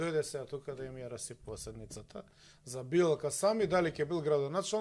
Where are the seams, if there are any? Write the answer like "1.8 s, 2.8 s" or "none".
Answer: none